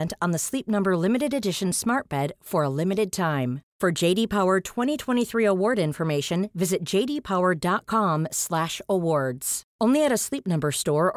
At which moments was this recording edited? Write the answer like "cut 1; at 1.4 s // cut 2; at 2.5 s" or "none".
none